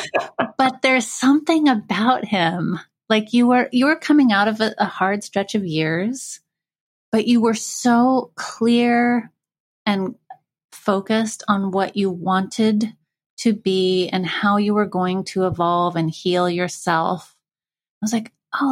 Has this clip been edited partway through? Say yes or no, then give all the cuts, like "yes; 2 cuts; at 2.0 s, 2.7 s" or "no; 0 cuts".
no; 0 cuts